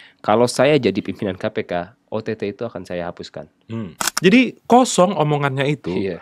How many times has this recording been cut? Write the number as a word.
one